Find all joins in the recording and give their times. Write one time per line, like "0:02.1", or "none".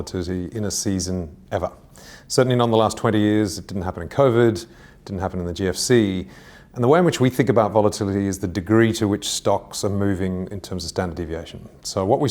none